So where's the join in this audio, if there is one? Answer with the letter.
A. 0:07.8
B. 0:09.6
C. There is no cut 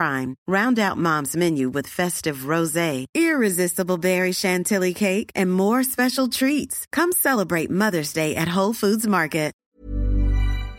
B